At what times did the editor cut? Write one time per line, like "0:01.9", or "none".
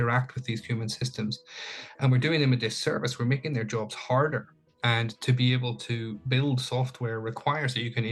0:04.8